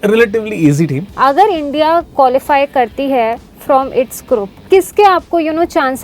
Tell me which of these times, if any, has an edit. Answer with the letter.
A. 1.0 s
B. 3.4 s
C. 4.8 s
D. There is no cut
A